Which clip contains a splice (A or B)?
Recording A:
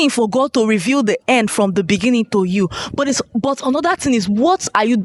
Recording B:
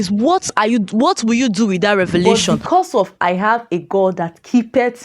B